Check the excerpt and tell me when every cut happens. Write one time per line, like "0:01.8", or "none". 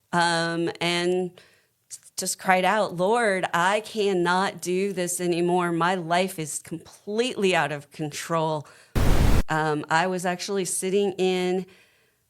0:09.2